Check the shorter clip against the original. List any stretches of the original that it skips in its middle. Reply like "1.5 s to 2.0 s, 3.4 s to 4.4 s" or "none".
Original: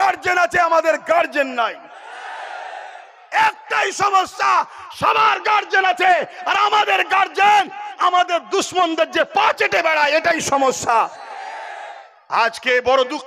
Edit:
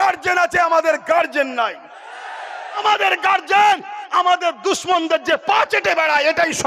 2.8 s to 6.7 s